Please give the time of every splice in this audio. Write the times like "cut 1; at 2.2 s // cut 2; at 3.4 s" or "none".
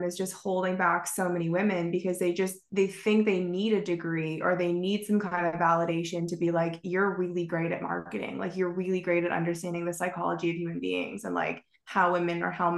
none